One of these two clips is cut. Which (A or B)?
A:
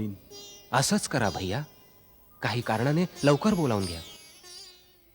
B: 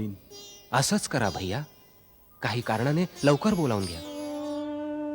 B